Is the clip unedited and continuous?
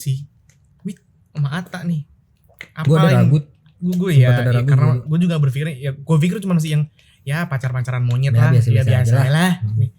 yes; 0 cuts

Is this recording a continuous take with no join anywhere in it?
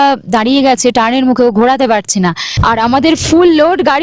no; 1 cut; at 2.5 s

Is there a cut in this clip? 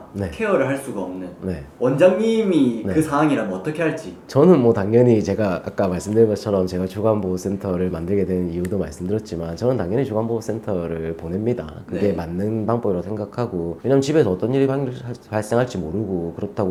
no; 0 cuts

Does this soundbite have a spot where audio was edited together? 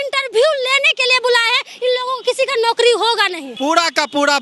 yes; 1 cut; at 3.4 s

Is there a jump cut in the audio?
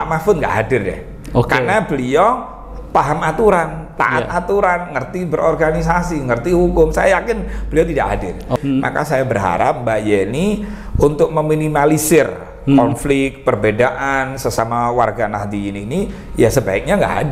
yes; 1 cut; at 8.6 s

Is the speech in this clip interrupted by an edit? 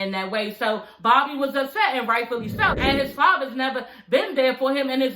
yes; 1 cut; at 2.7 s

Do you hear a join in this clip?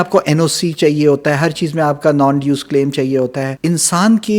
yes; 1 cut; at 3.5 s

